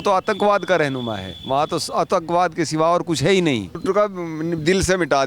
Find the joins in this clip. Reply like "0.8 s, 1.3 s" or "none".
3.8 s